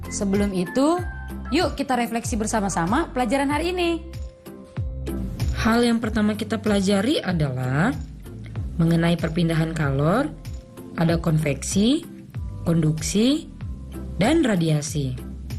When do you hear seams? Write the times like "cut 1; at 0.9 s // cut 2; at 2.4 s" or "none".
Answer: none